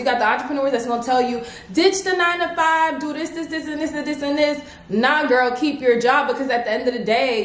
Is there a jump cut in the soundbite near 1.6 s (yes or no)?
no